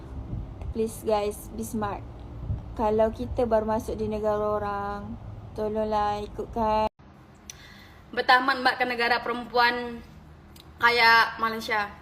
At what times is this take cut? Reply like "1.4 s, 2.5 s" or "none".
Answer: 6.9 s